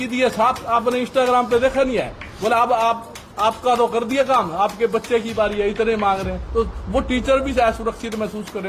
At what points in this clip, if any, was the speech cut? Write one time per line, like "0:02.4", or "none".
none